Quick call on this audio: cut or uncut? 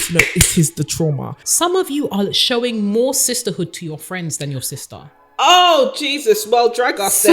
cut